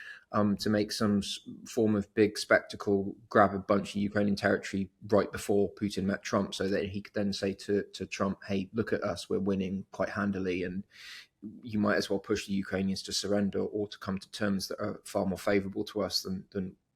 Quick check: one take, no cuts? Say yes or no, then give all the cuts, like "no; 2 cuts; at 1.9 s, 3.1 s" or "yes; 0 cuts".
yes; 0 cuts